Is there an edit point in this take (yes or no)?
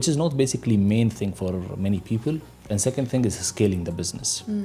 no